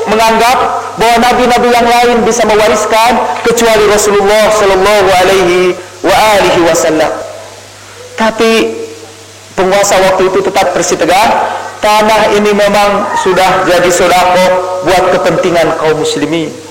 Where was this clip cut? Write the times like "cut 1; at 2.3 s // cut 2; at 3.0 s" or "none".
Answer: cut 1; at 5.9 s // cut 2; at 7.3 s